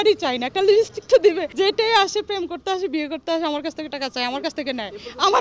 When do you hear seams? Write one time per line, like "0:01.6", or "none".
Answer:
0:01.5